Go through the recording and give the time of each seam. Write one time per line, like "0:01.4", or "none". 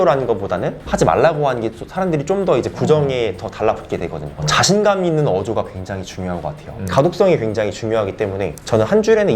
0:06.8